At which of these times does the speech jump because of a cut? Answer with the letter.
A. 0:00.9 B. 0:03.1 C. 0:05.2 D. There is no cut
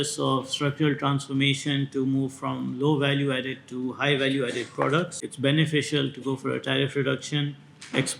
C